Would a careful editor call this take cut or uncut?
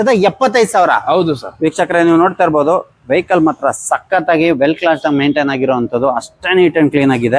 uncut